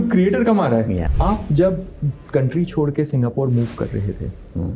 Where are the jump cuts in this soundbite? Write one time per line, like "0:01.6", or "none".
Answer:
0:01.1